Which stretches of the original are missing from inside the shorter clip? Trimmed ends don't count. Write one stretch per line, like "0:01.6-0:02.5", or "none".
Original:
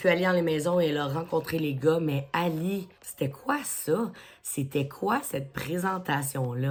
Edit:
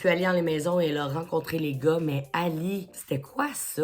0:02.9-0:03.0

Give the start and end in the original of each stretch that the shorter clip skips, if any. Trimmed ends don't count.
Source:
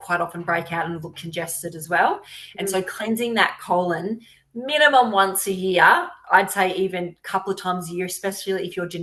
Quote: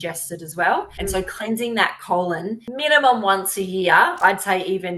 0:02.3-0:02.5
0:04.2-0:04.5
0:06.1-0:06.3

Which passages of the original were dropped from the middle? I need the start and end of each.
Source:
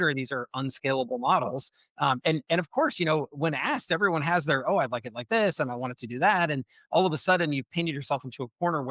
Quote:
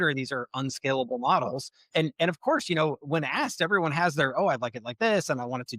0:01.9-0:02.2

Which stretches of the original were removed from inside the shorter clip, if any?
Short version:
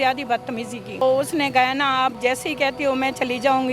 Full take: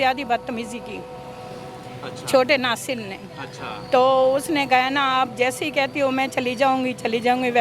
0:01.0-0:04.2

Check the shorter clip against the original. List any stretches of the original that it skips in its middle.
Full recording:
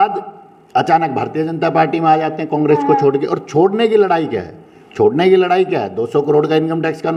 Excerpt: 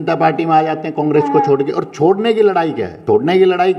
0:04.4-0:04.8

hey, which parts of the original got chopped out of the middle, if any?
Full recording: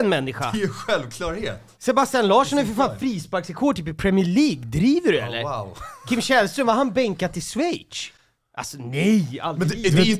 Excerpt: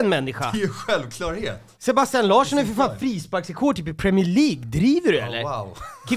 none

